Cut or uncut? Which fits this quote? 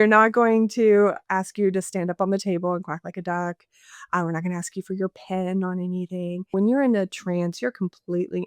cut